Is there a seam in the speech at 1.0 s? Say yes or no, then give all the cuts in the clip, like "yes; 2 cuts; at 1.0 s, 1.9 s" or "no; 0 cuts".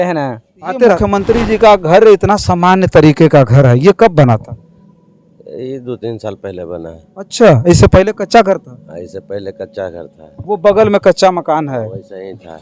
yes; 1 cut; at 1.0 s